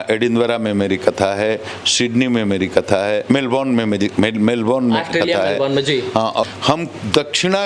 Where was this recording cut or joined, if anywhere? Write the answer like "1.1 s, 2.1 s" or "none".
6.5 s